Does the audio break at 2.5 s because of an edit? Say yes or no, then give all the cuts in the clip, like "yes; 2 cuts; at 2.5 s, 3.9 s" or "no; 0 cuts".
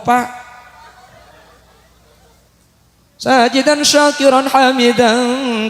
yes; 1 cut; at 2.5 s